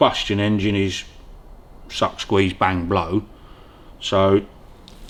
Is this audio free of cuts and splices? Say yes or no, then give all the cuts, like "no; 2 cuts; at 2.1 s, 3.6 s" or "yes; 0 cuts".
yes; 0 cuts